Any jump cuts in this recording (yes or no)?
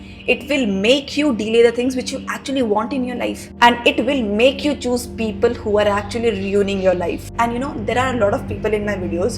yes